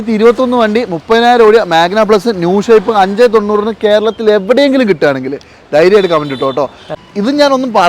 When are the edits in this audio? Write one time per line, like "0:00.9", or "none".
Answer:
0:06.8